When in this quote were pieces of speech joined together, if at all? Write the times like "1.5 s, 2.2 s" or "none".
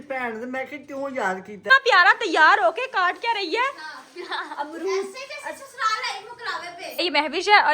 1.7 s, 7.0 s